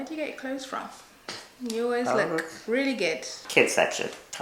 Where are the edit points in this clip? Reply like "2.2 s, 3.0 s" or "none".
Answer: 3.4 s